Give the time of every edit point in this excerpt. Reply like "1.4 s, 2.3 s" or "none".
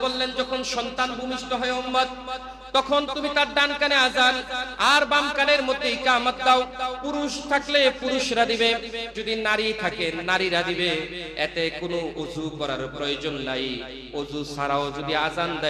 none